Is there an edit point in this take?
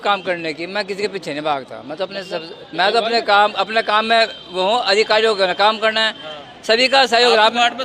no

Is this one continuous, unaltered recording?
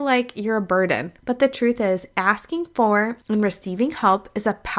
no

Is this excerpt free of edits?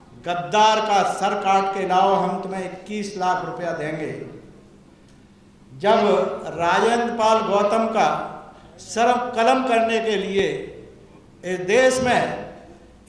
yes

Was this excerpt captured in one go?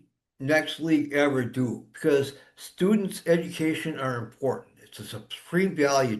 no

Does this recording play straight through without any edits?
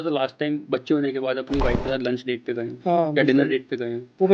yes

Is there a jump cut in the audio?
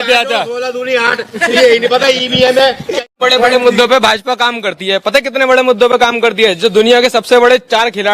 yes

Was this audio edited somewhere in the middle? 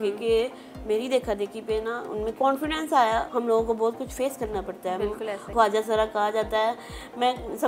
yes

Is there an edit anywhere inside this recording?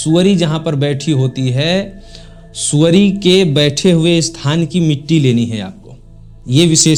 no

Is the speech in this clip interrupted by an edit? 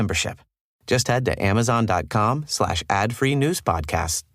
no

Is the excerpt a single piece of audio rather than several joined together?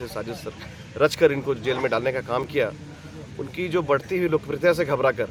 yes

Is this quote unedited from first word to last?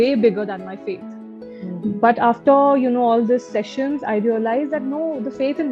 yes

